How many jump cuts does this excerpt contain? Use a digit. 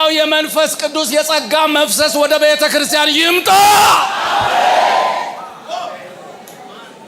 0